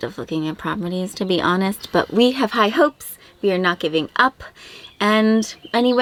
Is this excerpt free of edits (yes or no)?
yes